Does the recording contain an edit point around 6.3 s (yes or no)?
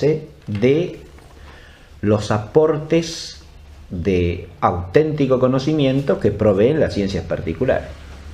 no